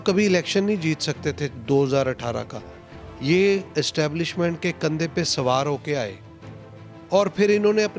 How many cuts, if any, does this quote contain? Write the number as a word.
zero